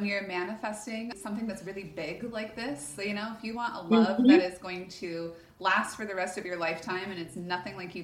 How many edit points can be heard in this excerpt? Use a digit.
1